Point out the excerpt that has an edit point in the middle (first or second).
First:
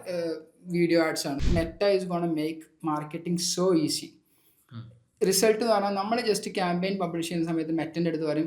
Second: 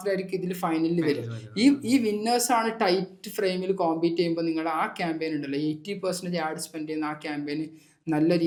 first